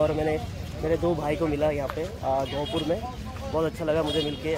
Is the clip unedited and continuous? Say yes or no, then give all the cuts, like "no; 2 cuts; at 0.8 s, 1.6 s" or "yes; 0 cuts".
yes; 0 cuts